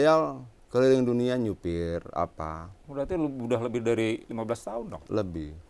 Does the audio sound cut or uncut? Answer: uncut